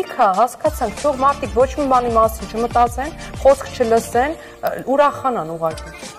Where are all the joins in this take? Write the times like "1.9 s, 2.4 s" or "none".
none